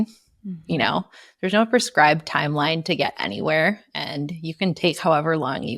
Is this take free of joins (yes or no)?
yes